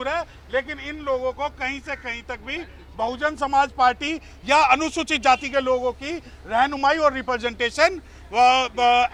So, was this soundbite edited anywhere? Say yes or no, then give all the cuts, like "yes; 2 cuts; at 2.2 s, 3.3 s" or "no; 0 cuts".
no; 0 cuts